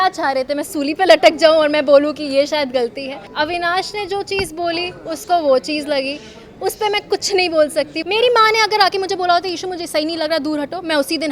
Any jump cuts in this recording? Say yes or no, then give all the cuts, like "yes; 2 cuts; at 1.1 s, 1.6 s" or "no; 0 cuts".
yes; 2 cuts; at 3.2 s, 8.0 s